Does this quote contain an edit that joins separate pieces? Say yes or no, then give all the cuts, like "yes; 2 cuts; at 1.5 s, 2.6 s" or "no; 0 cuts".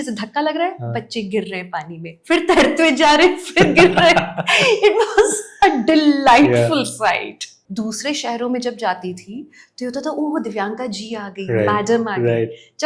yes; 1 cut; at 7.5 s